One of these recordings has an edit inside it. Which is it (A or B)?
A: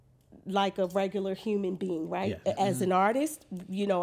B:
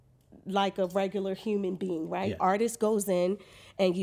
B